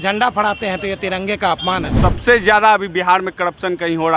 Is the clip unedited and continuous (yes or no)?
no